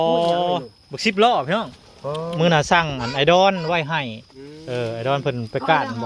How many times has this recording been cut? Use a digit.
1